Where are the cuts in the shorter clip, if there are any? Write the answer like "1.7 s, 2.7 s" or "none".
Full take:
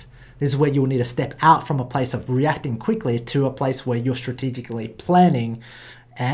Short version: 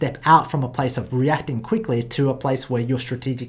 none